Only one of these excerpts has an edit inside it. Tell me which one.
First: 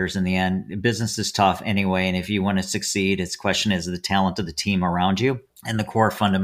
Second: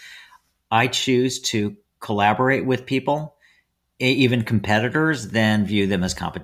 first; 1 cut; at 5.5 s

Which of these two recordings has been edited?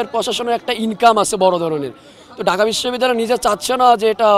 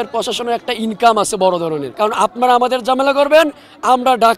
second; 1 cut; at 1.9 s

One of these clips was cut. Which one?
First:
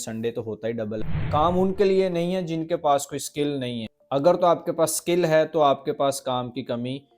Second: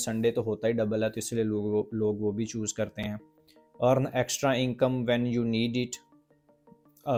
first; 1 cut; at 1.0 s

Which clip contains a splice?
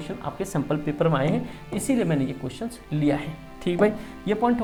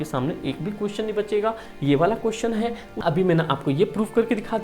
second; 1 cut; at 2.9 s

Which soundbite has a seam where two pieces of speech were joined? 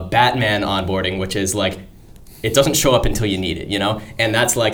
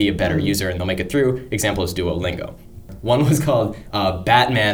second; 1 cut; at 2.9 s

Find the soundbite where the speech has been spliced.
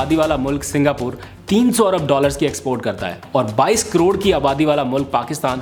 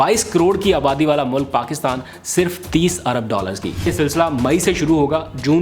second; 1 cut; at 3.9 s

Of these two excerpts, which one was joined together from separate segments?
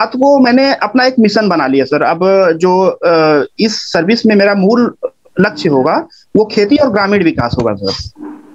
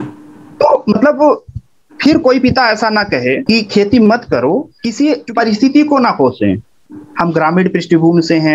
second; 2 cuts; at 3.4 s, 4.8 s

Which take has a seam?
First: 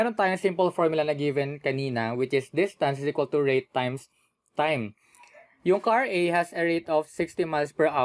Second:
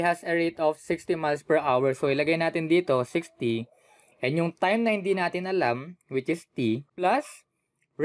second; 1 cut; at 7.0 s

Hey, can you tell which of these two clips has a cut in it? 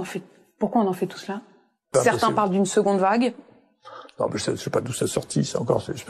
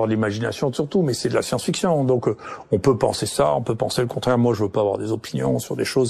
first; 1 cut; at 1.9 s

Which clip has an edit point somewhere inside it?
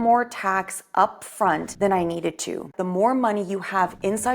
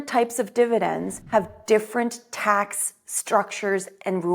first; 2 cuts; at 1.7 s, 2.8 s

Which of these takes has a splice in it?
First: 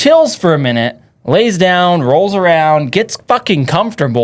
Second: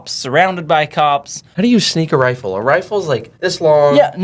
second; 2 cuts; at 1.4 s, 3.3 s

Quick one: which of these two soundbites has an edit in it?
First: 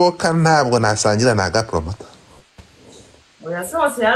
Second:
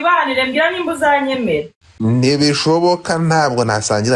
second; 1 cut; at 1.8 s

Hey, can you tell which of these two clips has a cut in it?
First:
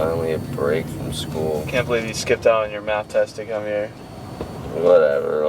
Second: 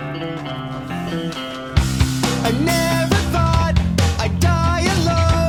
first; 1 cut; at 1.7 s

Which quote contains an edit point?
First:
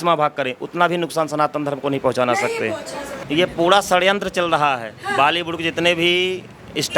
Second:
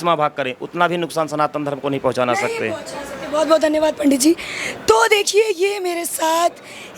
first; 1 cut; at 3.1 s

